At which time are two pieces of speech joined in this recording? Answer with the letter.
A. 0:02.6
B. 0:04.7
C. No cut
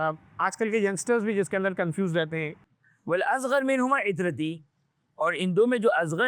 A